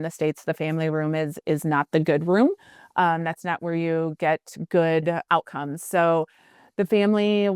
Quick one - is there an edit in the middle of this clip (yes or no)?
yes